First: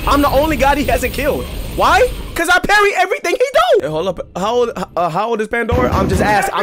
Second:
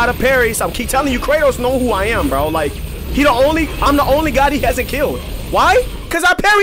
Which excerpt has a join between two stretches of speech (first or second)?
first